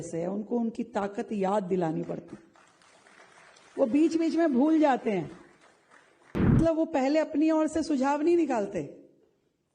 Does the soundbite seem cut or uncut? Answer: cut